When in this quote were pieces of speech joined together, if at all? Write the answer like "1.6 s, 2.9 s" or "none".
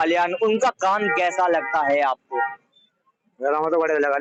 none